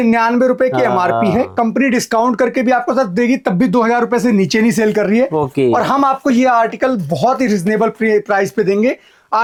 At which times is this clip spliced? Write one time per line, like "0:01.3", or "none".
none